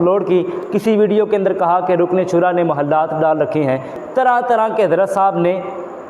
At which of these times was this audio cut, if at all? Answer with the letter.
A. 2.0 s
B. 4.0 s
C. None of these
B